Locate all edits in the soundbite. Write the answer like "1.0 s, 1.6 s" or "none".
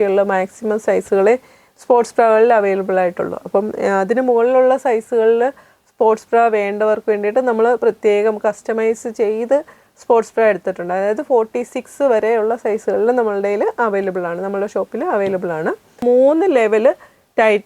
16.0 s